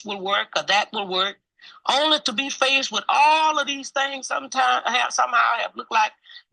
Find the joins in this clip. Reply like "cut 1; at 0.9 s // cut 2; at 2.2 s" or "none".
none